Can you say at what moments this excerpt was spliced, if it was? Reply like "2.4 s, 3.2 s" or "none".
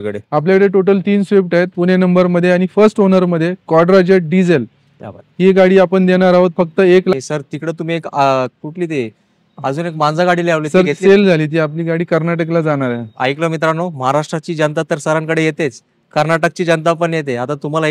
1.7 s, 7.1 s